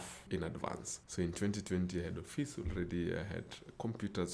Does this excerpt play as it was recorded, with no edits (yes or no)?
yes